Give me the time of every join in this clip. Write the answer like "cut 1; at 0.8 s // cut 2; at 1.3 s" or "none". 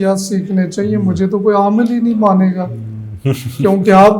none